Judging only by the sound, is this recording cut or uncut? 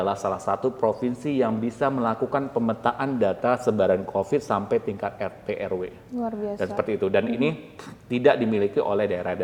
uncut